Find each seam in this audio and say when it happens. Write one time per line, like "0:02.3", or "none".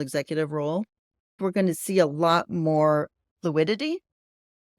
0:01.4